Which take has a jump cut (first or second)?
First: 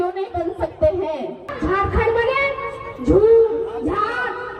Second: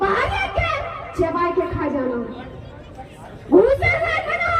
first